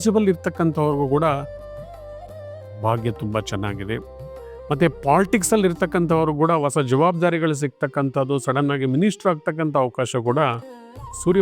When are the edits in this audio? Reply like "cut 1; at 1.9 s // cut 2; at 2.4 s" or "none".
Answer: none